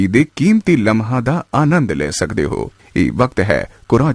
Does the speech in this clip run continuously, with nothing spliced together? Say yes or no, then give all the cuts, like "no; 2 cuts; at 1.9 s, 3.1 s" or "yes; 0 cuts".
no; 1 cut; at 2.8 s